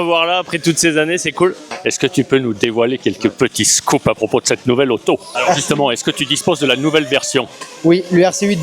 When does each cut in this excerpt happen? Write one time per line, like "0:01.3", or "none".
0:01.7
0:05.3